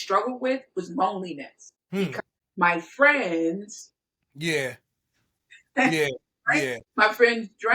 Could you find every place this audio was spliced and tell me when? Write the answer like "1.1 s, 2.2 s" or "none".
2.1 s, 6.8 s